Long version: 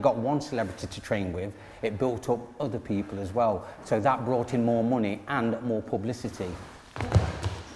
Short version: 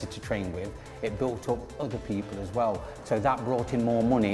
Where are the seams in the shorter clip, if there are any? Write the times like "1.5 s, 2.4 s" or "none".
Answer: none